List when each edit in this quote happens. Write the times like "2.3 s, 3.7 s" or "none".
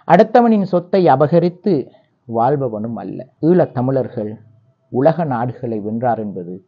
3.2 s